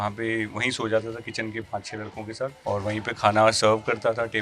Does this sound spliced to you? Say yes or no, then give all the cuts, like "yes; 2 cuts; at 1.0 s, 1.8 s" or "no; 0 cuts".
yes; 1 cut; at 2.6 s